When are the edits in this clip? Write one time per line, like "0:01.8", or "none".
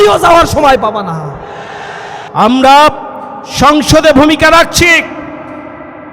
0:02.2